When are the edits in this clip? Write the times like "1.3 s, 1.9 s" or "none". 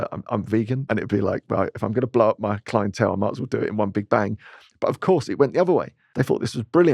0.8 s, 6.0 s